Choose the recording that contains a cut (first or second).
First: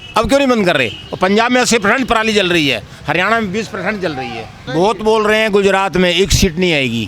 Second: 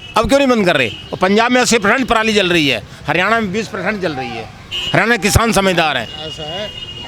first